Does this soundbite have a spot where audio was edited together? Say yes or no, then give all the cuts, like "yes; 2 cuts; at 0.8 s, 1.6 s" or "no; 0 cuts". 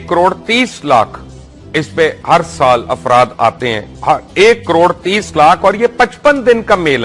no; 0 cuts